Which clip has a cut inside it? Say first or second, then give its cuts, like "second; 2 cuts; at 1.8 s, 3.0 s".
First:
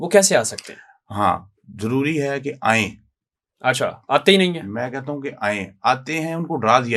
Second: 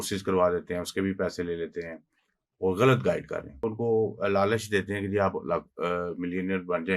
second; 1 cut; at 3.6 s